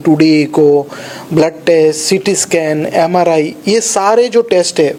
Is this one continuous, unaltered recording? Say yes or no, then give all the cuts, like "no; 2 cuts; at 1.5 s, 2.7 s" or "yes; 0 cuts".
yes; 0 cuts